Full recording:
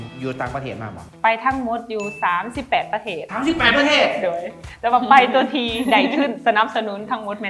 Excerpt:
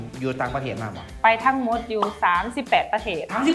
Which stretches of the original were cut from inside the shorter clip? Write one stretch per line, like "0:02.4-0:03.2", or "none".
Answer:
none